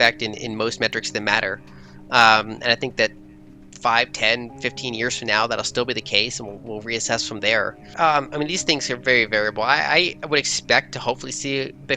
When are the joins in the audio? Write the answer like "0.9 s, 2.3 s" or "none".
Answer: 7.8 s